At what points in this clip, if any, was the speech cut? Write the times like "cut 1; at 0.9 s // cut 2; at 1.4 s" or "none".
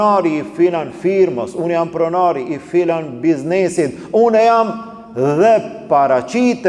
none